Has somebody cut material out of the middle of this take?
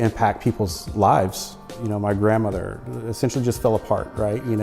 yes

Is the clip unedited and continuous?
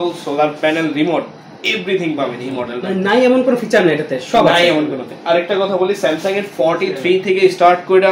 yes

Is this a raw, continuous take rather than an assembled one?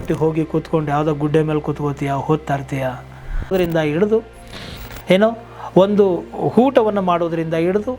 no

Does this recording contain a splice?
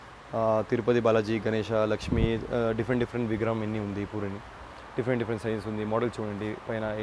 no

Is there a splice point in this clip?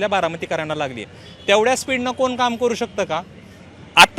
no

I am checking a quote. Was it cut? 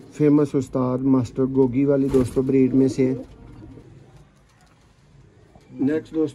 yes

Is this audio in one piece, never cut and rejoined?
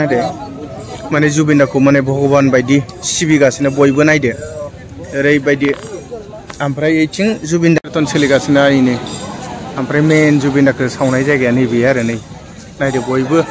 no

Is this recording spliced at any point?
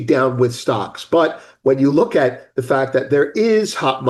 no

